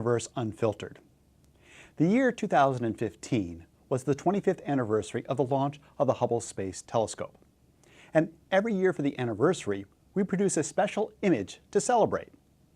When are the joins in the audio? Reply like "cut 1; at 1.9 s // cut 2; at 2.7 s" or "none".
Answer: cut 1; at 3.6 s